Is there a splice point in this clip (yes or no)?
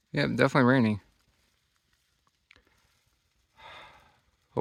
no